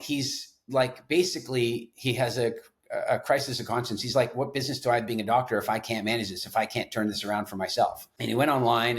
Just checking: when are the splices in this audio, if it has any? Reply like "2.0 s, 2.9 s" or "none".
8.1 s